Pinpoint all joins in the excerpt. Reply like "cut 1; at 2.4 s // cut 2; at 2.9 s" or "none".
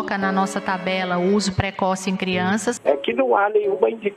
cut 1; at 2.7 s